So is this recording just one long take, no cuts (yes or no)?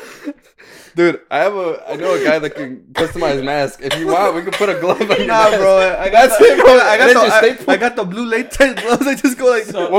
yes